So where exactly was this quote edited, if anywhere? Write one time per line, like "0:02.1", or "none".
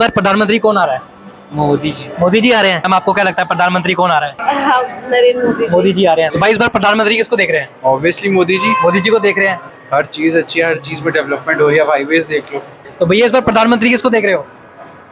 0:02.8
0:04.3
0:06.3
0:09.6
0:12.8